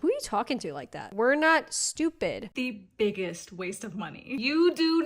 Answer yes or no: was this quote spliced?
yes